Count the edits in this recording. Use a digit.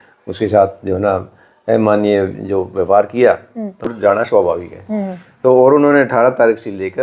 1